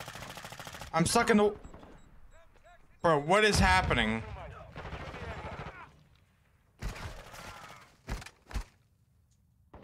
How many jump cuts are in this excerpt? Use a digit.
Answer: 0